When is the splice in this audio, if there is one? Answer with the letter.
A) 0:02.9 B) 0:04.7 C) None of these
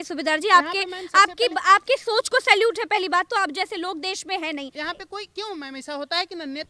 B